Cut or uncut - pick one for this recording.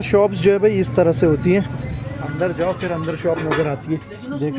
uncut